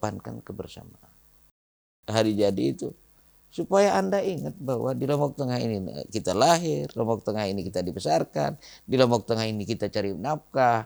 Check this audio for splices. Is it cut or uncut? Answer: cut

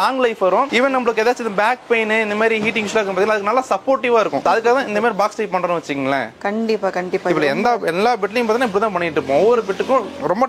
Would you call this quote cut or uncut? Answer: uncut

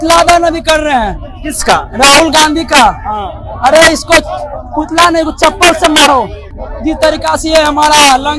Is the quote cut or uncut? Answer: uncut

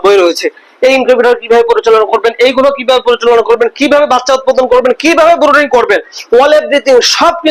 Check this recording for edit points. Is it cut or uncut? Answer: uncut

